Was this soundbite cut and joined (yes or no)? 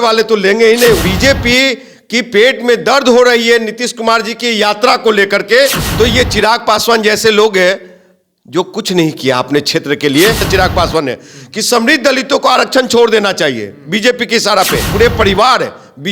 yes